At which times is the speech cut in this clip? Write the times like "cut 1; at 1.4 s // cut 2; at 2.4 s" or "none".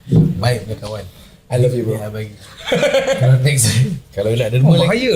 cut 1; at 4.0 s